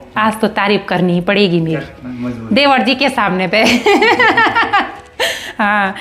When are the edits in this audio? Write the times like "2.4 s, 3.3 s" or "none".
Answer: none